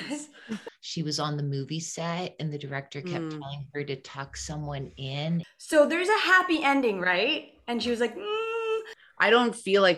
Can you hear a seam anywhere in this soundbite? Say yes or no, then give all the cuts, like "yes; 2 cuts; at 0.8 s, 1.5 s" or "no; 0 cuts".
yes; 3 cuts; at 0.8 s, 5.5 s, 8.9 s